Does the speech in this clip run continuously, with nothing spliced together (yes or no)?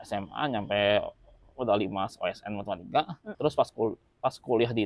no